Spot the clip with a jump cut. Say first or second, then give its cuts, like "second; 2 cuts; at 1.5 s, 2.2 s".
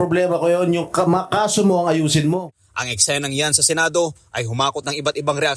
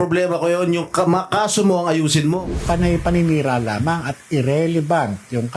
second; 1 cut; at 2.6 s